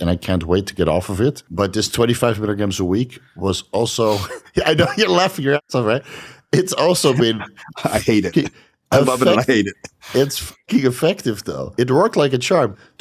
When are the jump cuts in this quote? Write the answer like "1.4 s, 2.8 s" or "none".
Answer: 1.5 s, 11.5 s